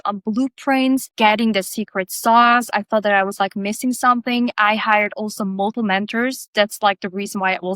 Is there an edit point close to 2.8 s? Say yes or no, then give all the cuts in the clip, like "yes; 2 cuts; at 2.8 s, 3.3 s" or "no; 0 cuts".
no; 2 cuts; at 1.1 s, 5.7 s